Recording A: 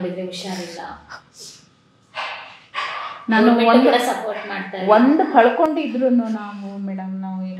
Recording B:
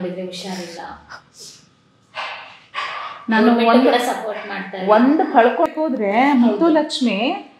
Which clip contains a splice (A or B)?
B